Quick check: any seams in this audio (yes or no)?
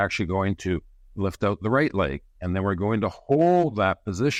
no